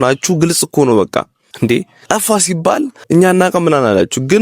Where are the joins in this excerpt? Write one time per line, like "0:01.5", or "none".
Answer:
0:01.7
0:03.0